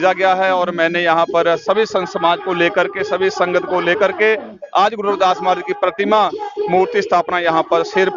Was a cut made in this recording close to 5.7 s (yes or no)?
no